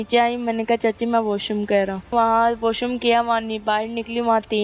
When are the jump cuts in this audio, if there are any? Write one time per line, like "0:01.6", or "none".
0:02.1